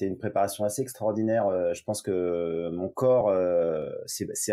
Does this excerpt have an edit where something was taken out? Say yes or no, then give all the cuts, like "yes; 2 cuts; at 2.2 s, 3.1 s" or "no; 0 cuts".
no; 0 cuts